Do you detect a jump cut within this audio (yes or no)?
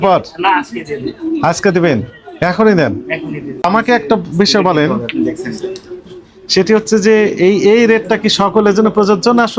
yes